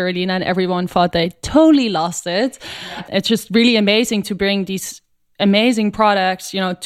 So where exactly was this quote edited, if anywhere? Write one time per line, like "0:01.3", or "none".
0:02.7

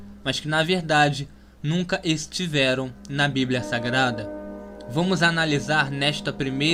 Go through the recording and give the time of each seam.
none

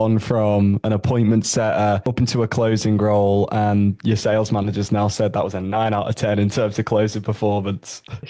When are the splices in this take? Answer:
none

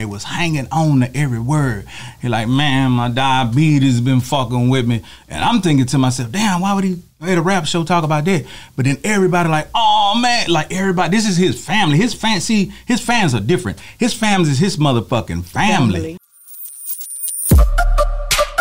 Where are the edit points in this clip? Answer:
0:16.2

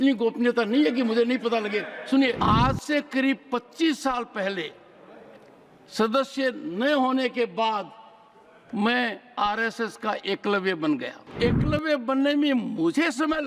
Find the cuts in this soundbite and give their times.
0:02.4
0:11.3

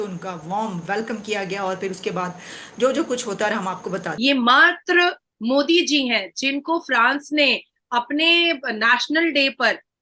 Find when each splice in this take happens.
0:04.1

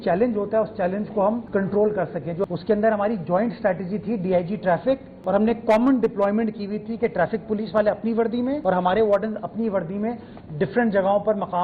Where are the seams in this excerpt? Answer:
0:02.4
0:05.1
0:08.6

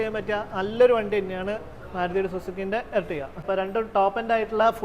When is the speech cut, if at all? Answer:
0:03.4

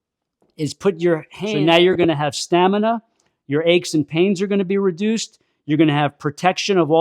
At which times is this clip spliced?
0:01.4

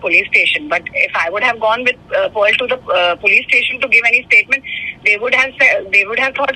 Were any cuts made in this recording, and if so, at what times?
none

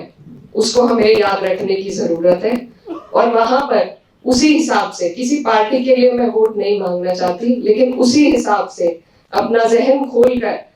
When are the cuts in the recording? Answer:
none

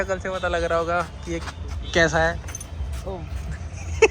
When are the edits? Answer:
none

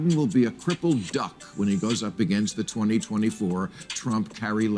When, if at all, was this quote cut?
0:03.1

